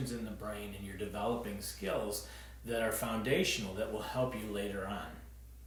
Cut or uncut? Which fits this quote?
uncut